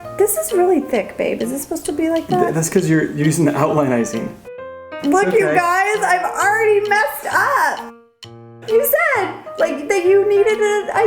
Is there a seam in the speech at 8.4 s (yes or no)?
yes